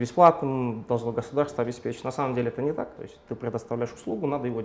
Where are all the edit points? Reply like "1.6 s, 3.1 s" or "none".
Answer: 3.1 s